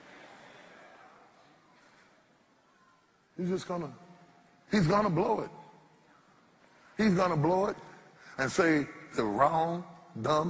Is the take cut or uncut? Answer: uncut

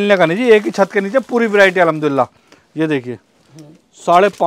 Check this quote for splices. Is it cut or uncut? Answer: uncut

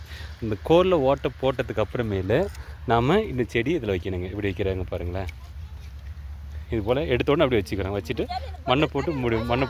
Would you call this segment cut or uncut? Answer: uncut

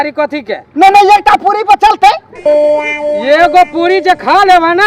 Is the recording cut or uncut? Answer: cut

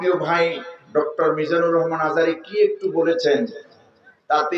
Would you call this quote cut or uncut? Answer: uncut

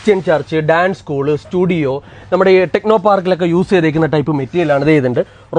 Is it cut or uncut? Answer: uncut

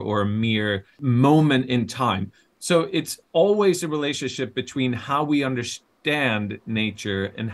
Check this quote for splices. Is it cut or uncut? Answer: cut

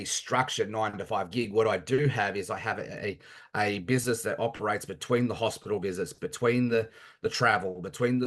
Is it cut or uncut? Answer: uncut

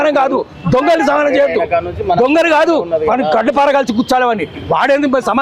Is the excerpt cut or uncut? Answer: uncut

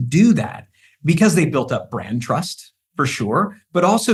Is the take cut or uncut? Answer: uncut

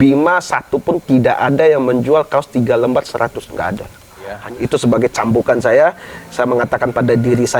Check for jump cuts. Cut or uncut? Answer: cut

